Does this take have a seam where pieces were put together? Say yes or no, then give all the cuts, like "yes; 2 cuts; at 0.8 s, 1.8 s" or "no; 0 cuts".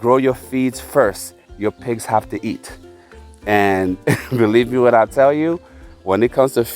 yes; 1 cut; at 1.5 s